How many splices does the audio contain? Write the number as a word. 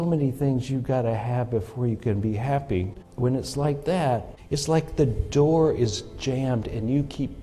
two